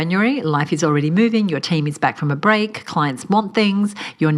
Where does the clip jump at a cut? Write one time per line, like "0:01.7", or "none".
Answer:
none